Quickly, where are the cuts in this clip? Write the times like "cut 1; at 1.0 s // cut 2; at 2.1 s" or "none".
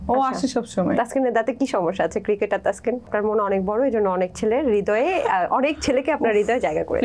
cut 1; at 3.1 s

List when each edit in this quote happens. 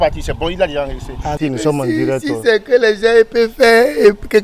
cut 1; at 1.4 s

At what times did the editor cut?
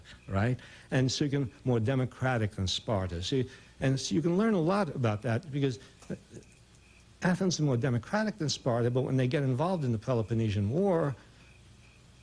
cut 1; at 2.6 s

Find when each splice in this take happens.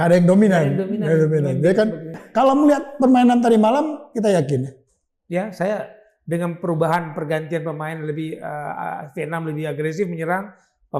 cut 1; at 2.2 s

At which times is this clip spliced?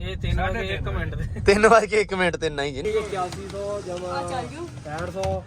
cut 1; at 2.8 s

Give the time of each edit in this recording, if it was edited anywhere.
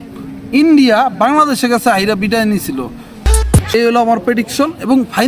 cut 1; at 3.2 s

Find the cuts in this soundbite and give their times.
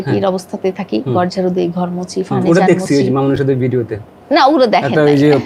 none

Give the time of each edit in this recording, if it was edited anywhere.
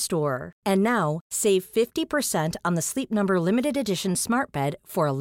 none

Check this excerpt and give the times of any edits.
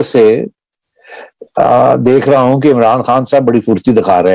none

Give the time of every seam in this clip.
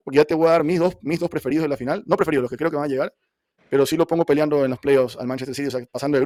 none

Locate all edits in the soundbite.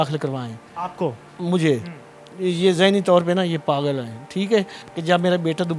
cut 1; at 4.8 s

